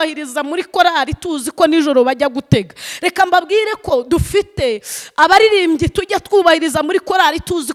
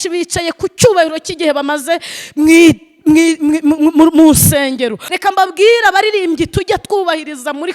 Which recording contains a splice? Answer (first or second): second